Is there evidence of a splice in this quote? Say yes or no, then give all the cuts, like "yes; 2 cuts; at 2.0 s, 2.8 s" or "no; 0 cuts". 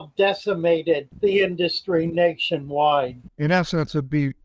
yes; 2 cuts; at 1.1 s, 3.3 s